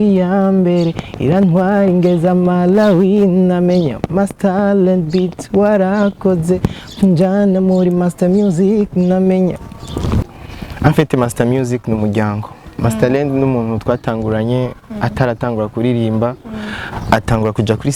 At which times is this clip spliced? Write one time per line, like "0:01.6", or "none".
0:10.2